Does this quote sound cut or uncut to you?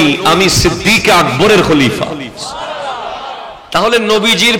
cut